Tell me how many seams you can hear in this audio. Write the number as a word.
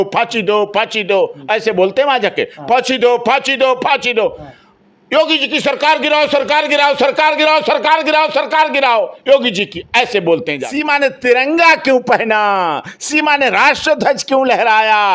one